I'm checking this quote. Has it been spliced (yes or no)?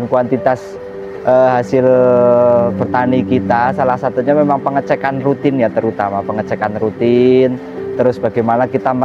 no